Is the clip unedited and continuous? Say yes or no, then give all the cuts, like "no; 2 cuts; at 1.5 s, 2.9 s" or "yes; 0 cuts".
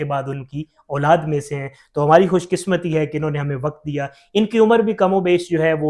yes; 0 cuts